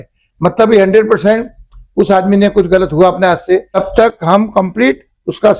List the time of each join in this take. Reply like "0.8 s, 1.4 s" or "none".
3.8 s